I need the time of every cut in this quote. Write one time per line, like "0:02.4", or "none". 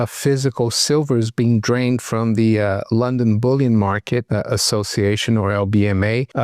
none